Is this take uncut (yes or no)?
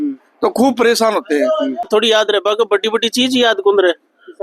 no